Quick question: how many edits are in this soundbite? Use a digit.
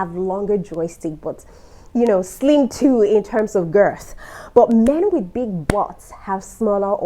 0